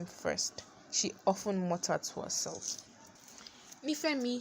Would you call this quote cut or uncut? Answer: cut